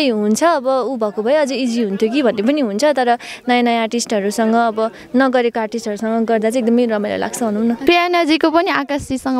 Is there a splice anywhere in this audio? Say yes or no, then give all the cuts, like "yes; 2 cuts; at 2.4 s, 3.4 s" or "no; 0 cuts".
yes; 1 cut; at 7.8 s